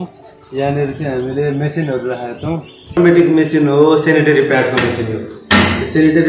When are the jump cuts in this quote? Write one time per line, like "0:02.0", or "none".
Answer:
0:03.0